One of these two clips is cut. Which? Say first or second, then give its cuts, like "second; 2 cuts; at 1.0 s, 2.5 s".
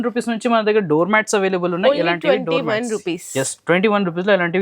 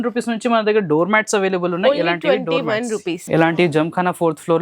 second; 1 cut; at 3.3 s